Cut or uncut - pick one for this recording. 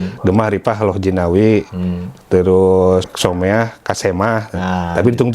cut